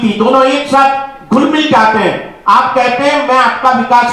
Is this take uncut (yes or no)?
yes